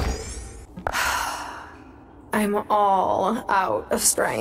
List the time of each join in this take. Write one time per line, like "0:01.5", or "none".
0:00.9